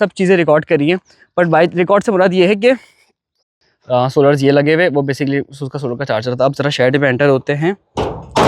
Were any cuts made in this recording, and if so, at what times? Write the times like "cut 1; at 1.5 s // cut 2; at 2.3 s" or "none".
cut 1; at 3.5 s